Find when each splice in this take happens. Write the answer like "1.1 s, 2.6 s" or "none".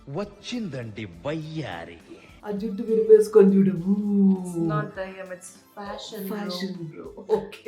none